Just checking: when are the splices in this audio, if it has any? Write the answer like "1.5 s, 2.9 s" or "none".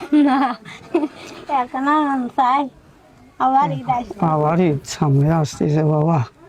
none